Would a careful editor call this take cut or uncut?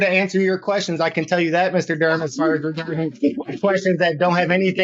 uncut